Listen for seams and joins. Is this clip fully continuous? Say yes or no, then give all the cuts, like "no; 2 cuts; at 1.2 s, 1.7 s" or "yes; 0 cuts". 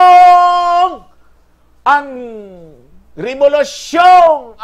yes; 0 cuts